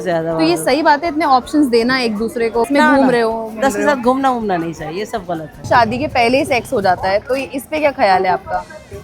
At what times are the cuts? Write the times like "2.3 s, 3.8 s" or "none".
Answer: 2.7 s, 5.6 s

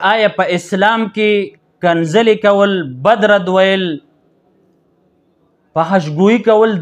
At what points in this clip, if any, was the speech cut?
none

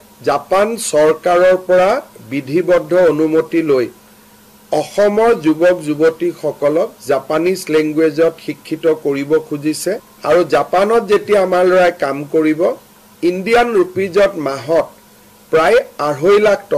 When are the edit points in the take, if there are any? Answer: 10.1 s

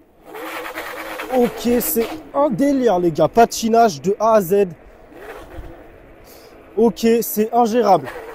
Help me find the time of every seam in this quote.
none

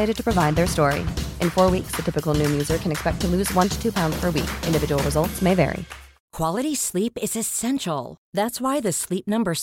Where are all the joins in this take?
6.2 s

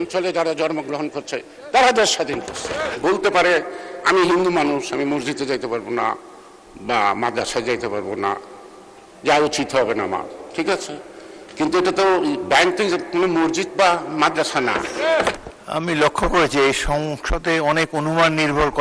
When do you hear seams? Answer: 2.9 s, 15.3 s

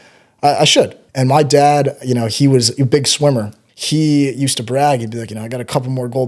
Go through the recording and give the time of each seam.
1.0 s

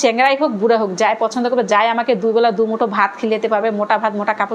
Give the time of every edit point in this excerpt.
none

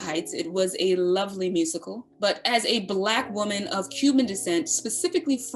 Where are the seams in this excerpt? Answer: none

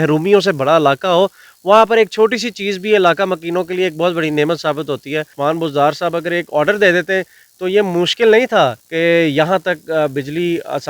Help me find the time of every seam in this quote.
5.3 s, 8.8 s

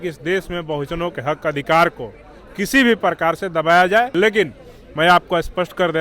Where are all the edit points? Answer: 4.1 s

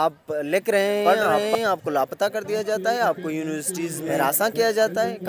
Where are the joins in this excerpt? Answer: 1.0 s, 4.0 s

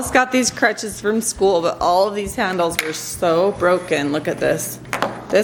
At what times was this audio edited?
none

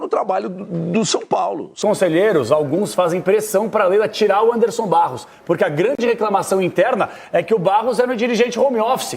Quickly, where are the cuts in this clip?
1.8 s

